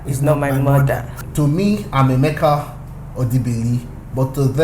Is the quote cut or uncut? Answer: cut